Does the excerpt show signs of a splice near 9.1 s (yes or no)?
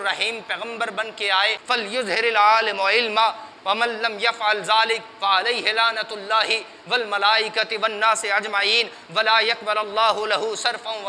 no